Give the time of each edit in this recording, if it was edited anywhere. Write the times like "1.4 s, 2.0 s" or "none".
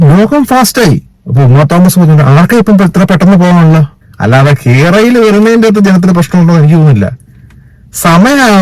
1.1 s, 4.0 s

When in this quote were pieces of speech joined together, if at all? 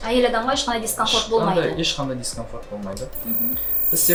none

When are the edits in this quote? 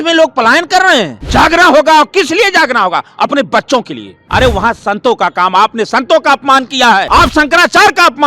1.2 s, 4.2 s, 7.1 s

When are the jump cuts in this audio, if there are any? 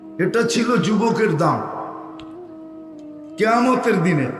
none

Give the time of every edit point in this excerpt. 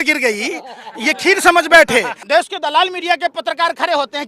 2.2 s

